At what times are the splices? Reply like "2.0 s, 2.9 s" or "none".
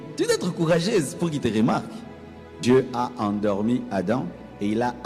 2.6 s